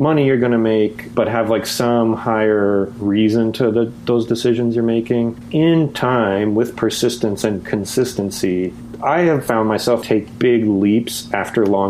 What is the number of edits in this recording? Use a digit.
2